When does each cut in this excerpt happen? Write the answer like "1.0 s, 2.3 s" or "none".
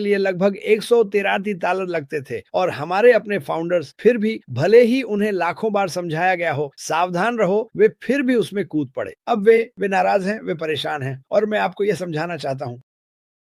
none